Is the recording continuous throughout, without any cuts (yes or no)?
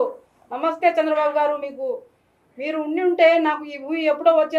yes